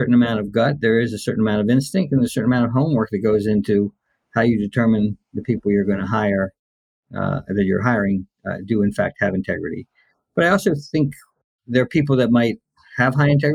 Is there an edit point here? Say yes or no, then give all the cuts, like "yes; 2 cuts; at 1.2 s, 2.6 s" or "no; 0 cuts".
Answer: no; 0 cuts